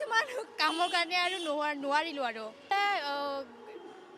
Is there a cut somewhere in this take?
yes; 1 cut; at 2.7 s

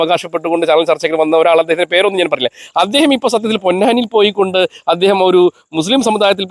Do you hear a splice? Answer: no; 0 cuts

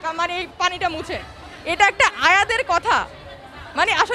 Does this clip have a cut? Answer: no; 0 cuts

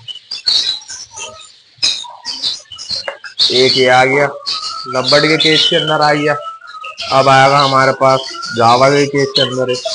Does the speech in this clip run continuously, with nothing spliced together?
yes; 0 cuts

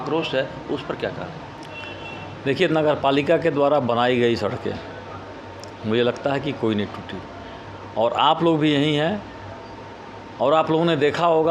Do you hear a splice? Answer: no; 0 cuts

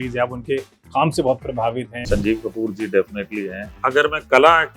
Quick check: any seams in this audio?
yes; 1 cut; at 3.6 s

